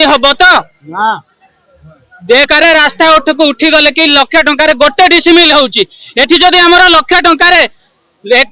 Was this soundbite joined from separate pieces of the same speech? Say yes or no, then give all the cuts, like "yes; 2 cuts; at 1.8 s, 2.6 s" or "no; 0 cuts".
no; 0 cuts